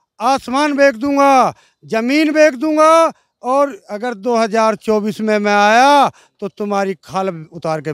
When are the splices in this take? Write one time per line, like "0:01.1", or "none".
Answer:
none